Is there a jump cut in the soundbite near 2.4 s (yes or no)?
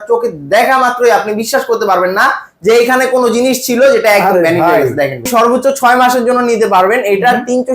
no